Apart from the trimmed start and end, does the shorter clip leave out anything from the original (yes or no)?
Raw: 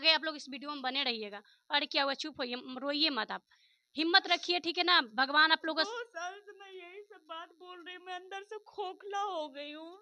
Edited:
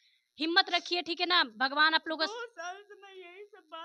no